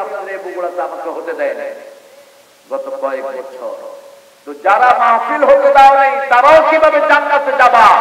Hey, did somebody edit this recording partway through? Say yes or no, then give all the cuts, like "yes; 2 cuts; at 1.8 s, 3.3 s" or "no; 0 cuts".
no; 0 cuts